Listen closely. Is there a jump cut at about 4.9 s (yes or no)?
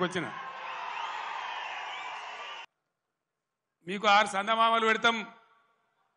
no